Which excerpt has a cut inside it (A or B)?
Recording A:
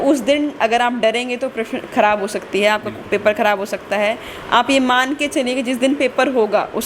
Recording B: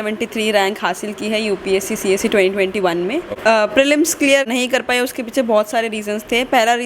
B